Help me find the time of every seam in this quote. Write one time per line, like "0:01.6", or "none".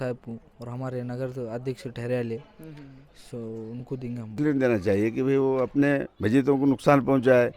0:04.3